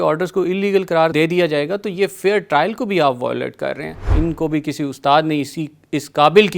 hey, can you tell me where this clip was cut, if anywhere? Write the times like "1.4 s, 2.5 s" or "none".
4.1 s